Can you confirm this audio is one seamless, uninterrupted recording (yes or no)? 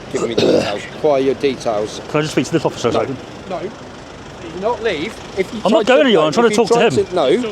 no